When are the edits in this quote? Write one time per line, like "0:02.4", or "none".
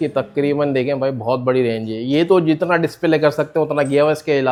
none